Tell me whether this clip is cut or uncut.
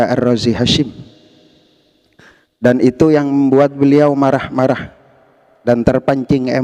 uncut